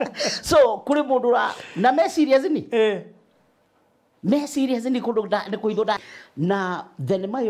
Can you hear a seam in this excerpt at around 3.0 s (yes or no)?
no